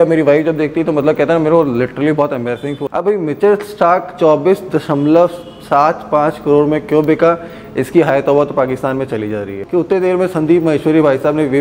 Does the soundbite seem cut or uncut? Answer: cut